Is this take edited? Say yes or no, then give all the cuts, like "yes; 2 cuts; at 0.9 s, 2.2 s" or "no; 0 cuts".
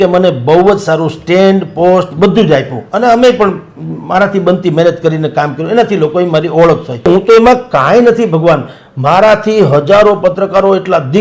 yes; 1 cut; at 7.1 s